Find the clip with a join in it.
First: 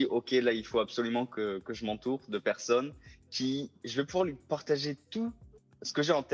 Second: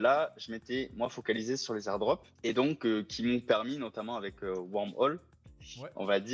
second; 1 cut; at 2.3 s

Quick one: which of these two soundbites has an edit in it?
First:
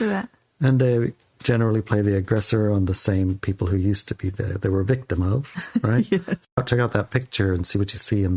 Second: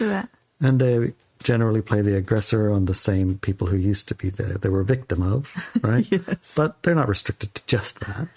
first; 1 cut; at 6.6 s

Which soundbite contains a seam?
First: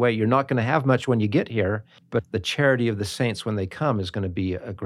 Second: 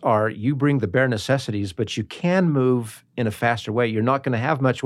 first; 1 cut; at 2.2 s

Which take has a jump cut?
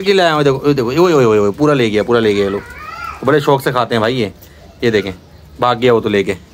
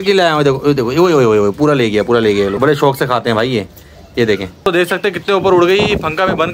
second; 2 cuts; at 2.6 s, 4.7 s

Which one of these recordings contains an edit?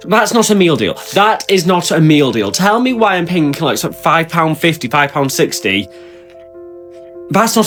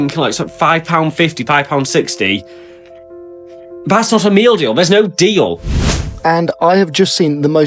second; 1 cut; at 5.7 s

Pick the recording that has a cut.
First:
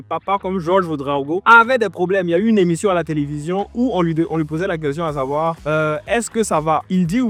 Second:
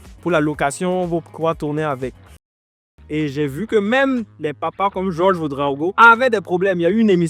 second; 1 cut; at 2.5 s

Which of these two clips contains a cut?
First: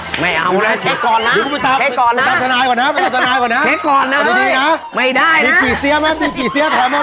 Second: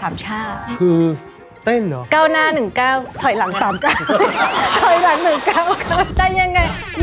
second; 1 cut; at 6.1 s

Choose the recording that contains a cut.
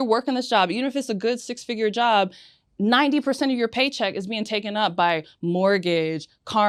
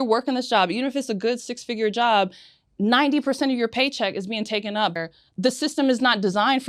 second; 1 cut; at 4.9 s

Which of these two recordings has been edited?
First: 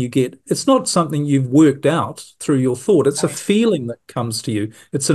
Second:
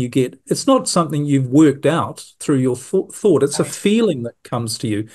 first; 1 cut; at 2.8 s

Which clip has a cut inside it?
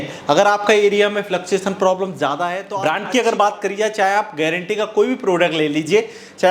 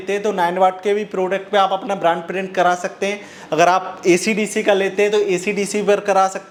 first; 1 cut; at 2.7 s

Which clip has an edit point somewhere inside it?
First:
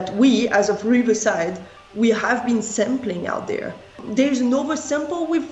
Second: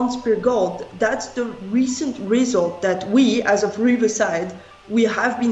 first; 1 cut; at 4.0 s

